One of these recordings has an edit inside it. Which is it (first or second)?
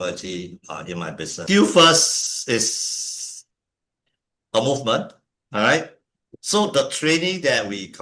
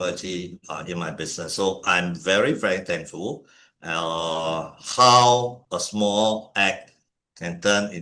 first